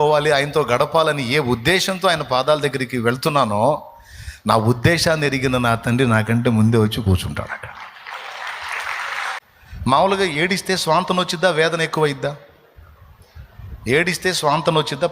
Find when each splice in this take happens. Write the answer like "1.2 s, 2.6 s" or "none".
9.4 s